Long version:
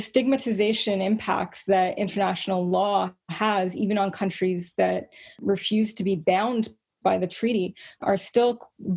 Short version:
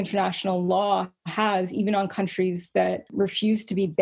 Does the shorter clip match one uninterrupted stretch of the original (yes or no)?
no